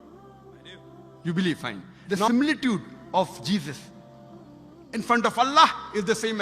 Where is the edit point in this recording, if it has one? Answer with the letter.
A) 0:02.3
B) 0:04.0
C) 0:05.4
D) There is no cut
A